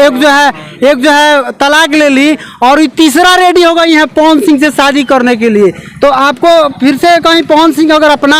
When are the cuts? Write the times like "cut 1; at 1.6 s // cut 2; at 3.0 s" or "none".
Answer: none